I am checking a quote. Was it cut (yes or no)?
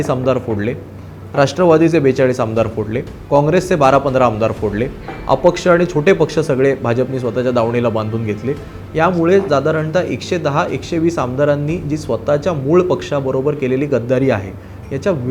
no